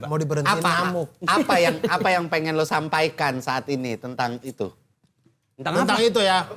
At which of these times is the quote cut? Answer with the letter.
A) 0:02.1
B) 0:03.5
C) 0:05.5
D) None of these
D